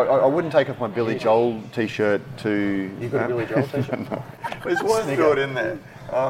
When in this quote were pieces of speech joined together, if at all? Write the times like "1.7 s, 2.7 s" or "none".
4.4 s